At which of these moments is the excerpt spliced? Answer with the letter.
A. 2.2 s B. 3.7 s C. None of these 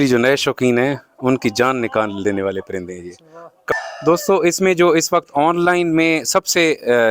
B